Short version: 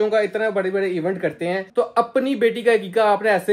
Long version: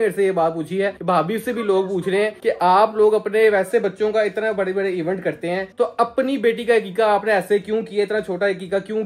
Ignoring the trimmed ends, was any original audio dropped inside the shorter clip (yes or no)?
no